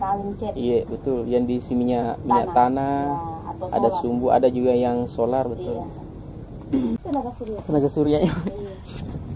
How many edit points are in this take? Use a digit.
1